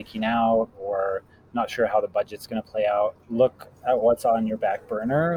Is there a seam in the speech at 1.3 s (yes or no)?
no